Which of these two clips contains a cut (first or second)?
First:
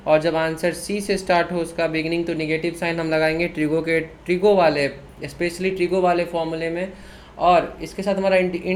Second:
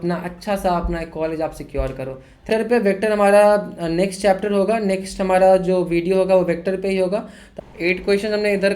second